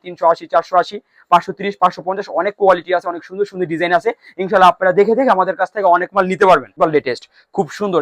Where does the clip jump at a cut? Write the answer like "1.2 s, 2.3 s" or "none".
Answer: 6.7 s